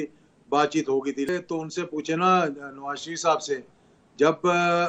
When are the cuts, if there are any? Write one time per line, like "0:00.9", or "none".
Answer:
0:01.3